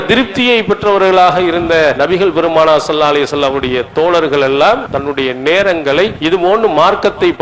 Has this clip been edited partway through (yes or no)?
yes